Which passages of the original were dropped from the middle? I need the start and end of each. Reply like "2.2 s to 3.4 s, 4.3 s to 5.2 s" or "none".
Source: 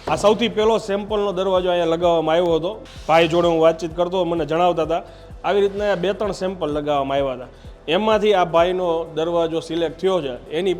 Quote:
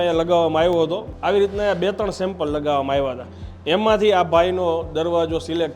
2.8 s to 5.3 s